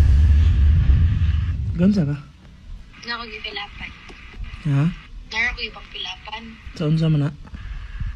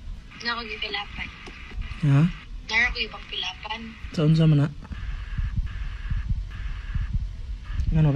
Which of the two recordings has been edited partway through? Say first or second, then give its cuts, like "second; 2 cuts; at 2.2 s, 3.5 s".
first; 1 cut; at 1.1 s